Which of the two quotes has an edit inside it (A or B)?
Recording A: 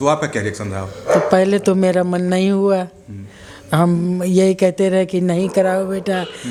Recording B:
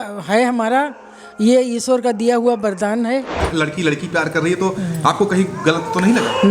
B